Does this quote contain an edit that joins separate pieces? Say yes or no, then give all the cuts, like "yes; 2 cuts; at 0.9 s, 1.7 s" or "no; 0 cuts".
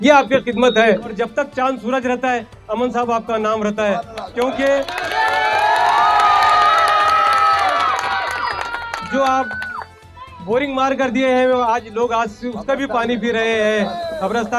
yes; 1 cut; at 1.1 s